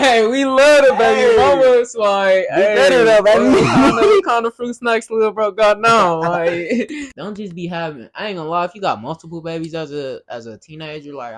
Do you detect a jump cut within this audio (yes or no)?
no